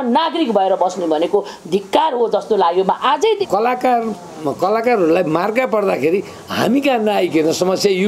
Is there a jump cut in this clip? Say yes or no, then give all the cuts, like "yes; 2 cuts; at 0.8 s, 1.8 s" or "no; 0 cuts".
yes; 1 cut; at 3.4 s